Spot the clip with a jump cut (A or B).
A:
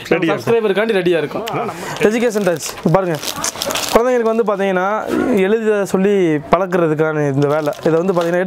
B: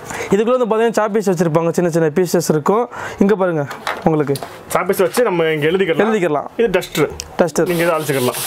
A